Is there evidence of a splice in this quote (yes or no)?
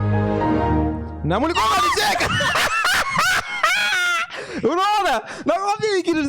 yes